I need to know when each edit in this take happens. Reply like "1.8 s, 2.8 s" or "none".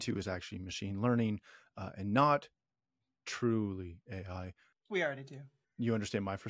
4.7 s